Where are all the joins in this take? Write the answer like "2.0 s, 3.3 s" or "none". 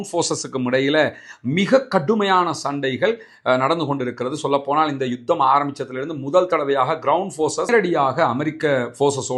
none